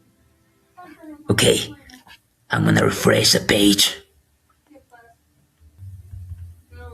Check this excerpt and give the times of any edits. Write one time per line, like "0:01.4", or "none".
0:05.8